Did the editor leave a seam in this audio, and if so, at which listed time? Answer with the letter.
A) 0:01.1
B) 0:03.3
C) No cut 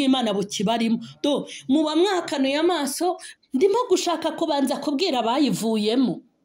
B